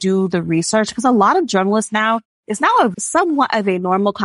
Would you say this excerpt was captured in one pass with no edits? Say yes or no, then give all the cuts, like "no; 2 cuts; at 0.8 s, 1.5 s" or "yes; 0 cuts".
no; 1 cut; at 2.9 s